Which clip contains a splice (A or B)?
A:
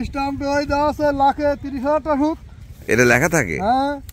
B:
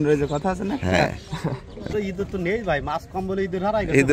B